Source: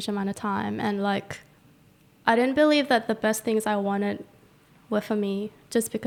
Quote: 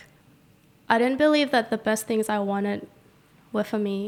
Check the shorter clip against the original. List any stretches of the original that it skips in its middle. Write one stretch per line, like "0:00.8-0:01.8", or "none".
none